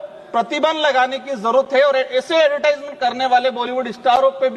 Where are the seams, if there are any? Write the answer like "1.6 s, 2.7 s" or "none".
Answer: none